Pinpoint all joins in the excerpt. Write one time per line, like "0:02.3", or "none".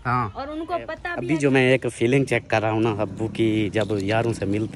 0:01.1